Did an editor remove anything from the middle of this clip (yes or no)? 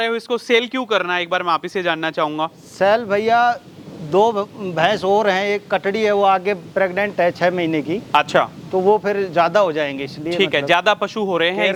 no